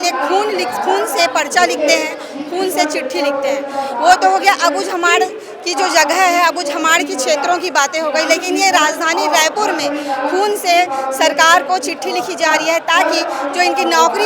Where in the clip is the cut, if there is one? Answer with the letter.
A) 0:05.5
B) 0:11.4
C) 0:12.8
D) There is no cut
D